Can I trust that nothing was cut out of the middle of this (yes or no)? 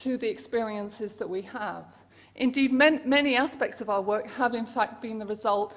no